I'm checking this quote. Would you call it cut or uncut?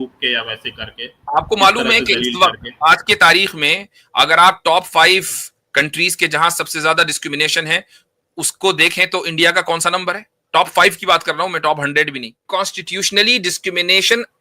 cut